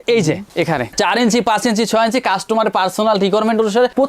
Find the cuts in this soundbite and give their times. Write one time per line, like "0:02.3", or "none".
0:00.9